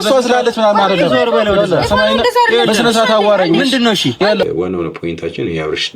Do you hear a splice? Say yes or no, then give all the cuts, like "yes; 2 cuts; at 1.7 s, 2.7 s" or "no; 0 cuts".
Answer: yes; 1 cut; at 4.4 s